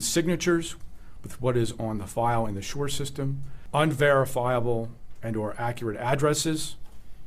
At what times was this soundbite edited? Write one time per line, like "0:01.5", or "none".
0:03.5